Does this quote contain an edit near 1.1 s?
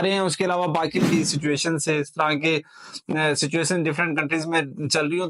yes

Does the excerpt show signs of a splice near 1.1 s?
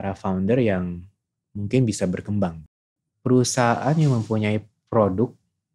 no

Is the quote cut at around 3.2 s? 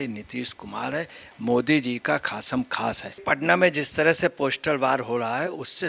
yes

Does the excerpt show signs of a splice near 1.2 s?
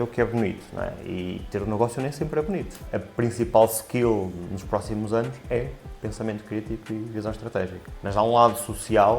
no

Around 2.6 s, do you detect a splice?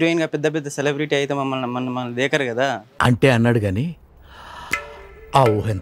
no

